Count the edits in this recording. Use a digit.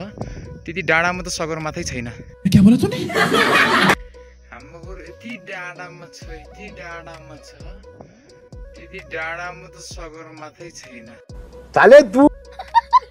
0